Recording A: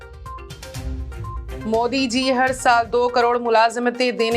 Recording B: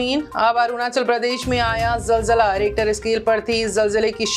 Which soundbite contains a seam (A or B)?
A